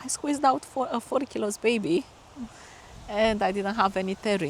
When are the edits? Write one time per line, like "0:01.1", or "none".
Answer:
none

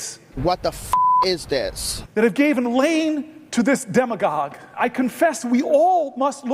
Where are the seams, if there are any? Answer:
0:04.8

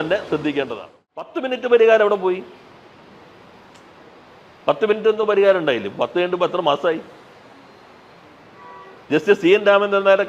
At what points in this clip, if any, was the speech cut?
0:01.3

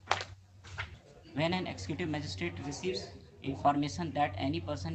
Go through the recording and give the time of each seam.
none

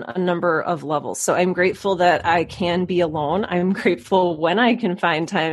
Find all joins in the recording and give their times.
none

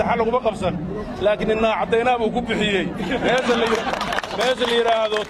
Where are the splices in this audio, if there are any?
none

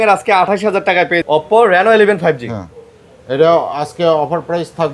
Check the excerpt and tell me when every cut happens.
0:01.2

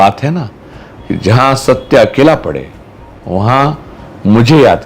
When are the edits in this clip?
none

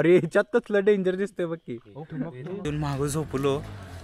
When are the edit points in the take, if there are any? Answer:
0:02.6

